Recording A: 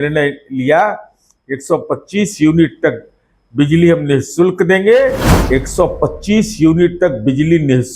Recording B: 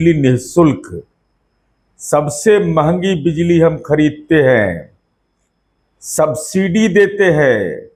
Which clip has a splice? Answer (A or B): A